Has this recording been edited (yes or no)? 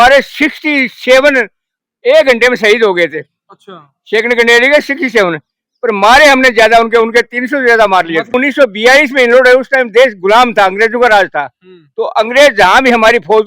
yes